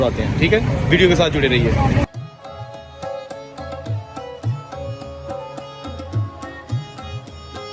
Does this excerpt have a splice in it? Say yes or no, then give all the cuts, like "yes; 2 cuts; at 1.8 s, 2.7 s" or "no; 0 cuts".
no; 0 cuts